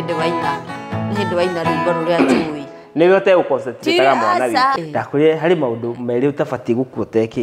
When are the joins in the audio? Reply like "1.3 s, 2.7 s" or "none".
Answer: 4.8 s